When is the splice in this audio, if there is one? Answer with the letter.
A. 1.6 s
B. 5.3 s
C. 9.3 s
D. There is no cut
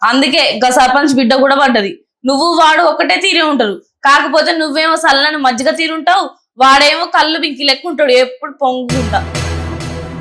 C